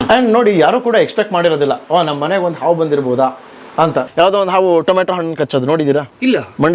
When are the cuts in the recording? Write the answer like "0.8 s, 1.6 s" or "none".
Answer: 4.1 s